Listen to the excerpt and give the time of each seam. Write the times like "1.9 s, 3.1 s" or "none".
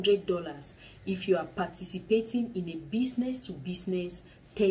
none